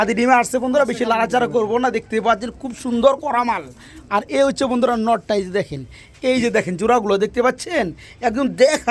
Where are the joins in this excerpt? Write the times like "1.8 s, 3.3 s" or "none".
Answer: none